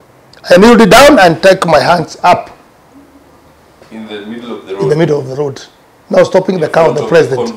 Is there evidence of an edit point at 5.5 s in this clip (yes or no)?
no